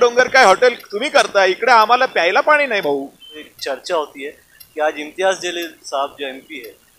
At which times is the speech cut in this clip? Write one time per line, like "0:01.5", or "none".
0:03.5